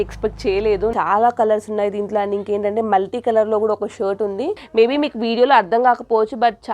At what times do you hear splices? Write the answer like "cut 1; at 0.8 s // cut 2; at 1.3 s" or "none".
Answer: cut 1; at 0.9 s // cut 2; at 4.6 s